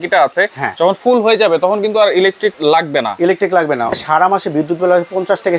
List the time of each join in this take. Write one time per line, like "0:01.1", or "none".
0:02.5
0:03.9